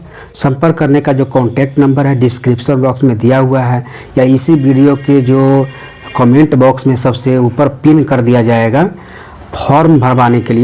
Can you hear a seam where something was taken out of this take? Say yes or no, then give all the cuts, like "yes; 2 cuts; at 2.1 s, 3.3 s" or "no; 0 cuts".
no; 0 cuts